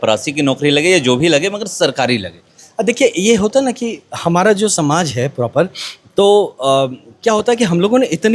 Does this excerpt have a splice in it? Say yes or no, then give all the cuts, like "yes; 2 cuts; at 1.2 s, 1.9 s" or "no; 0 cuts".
no; 0 cuts